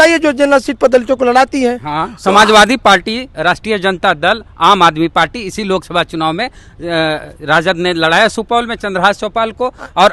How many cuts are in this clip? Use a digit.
0